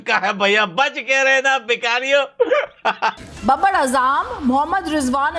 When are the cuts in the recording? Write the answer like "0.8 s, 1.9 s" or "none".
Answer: 3.2 s